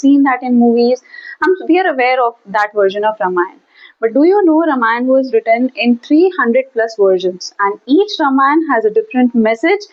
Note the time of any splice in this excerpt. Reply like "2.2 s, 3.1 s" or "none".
none